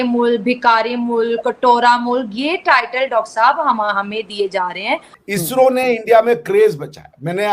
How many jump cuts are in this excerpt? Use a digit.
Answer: 1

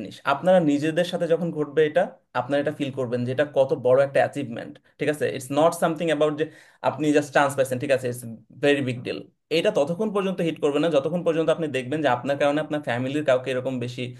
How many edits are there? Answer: 0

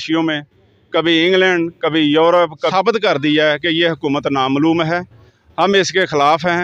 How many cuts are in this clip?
1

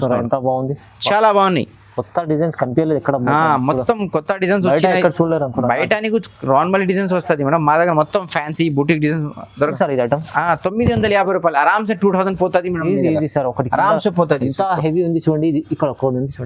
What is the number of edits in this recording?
1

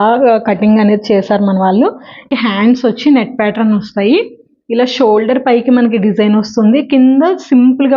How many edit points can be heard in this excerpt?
1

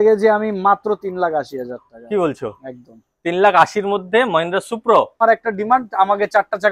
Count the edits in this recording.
1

